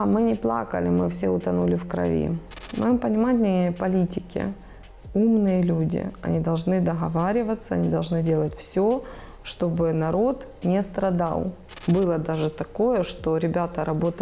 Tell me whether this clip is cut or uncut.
cut